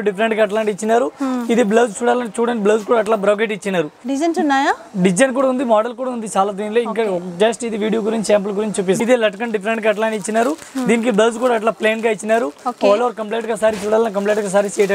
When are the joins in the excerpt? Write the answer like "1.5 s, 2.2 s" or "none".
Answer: 4.0 s, 9.0 s